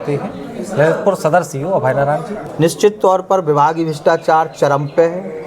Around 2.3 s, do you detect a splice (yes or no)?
yes